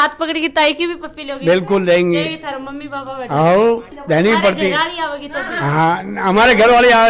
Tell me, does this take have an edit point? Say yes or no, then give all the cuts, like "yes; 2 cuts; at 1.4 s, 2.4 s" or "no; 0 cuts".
no; 0 cuts